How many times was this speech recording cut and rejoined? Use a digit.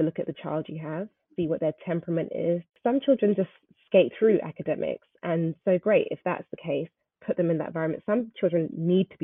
1